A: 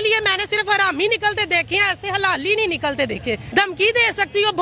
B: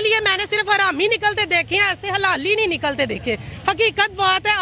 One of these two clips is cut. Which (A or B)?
A